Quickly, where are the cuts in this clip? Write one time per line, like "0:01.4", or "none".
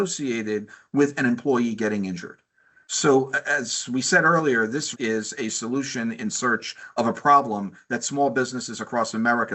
0:04.9

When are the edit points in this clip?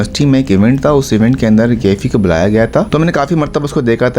0:02.9

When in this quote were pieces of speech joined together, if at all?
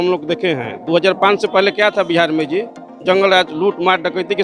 none

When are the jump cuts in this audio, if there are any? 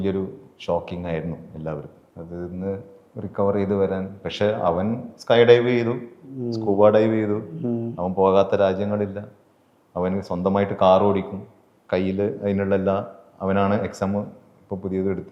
none

